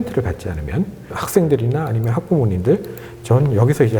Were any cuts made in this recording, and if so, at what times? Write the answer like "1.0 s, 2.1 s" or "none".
1.2 s